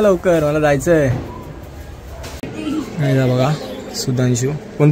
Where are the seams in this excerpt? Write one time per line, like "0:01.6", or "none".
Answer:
0:02.5